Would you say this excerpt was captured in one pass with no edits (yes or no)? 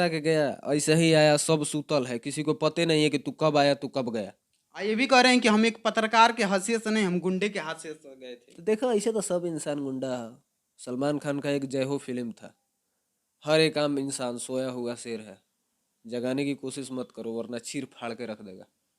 no